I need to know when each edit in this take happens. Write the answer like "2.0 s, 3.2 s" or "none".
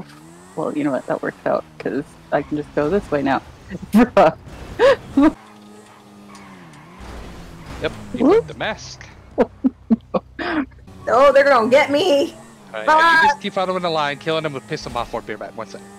5.4 s, 10.9 s